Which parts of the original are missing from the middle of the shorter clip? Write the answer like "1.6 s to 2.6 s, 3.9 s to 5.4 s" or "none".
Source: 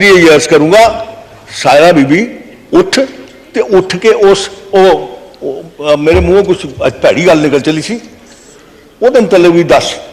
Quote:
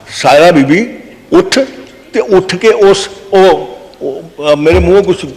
none